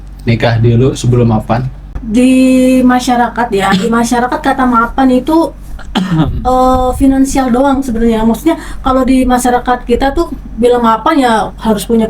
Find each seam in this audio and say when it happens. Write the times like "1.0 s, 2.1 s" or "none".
1.8 s